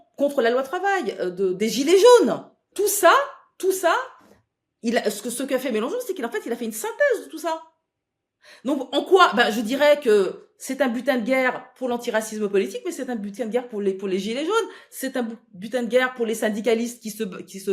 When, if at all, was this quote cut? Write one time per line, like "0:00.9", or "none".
0:02.7